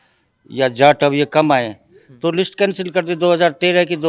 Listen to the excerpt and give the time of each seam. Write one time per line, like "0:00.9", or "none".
none